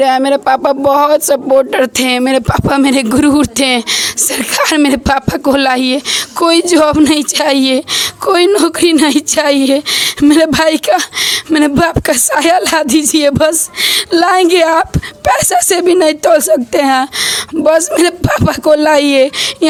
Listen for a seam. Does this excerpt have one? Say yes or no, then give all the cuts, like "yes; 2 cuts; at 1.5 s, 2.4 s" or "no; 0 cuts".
no; 0 cuts